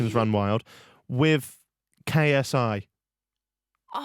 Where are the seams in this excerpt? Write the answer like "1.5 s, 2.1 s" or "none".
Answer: none